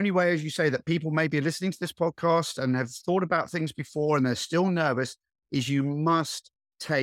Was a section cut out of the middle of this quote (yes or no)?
no